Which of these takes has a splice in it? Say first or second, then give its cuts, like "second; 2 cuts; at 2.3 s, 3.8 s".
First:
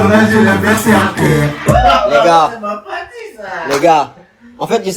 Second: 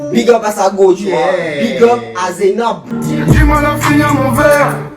second; 1 cut; at 2.9 s